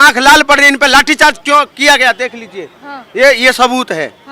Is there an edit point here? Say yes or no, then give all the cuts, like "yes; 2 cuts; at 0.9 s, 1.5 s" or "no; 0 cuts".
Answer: no; 0 cuts